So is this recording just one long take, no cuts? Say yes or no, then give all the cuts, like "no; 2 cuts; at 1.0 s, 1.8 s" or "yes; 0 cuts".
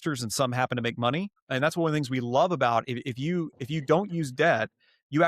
no; 1 cut; at 1.4 s